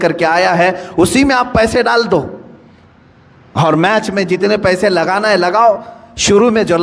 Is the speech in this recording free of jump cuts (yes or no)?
yes